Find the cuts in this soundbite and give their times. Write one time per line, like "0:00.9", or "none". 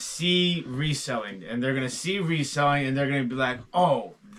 none